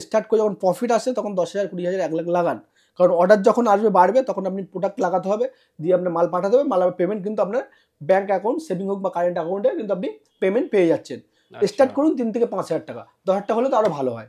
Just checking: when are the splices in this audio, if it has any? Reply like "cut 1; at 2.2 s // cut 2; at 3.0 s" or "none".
none